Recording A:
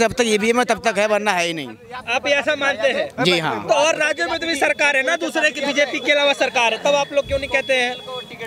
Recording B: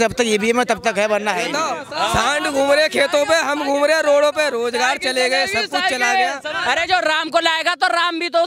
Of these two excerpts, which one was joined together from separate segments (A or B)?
B